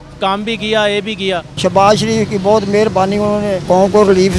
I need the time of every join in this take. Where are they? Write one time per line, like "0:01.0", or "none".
0:01.5
0:03.6